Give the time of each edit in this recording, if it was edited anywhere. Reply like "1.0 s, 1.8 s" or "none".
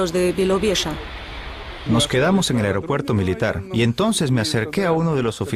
0.9 s